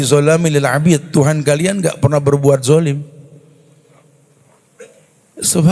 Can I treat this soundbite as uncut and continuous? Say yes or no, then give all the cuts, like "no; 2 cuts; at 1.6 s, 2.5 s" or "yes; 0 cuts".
yes; 0 cuts